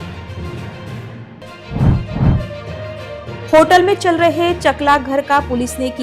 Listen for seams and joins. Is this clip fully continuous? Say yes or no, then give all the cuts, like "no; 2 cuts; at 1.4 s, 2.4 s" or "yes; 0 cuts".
no; 1 cut; at 1.3 s